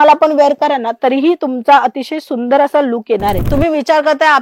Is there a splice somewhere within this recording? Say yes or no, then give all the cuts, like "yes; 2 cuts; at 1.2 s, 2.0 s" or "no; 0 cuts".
yes; 1 cut; at 3.4 s